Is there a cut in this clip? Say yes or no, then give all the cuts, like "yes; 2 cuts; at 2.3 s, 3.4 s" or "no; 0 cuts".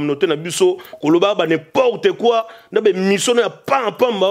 no; 0 cuts